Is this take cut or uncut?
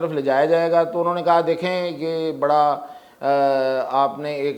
uncut